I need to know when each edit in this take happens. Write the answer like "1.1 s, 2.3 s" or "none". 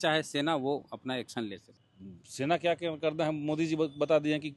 1.7 s